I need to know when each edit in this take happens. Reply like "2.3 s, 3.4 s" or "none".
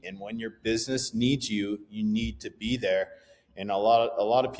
none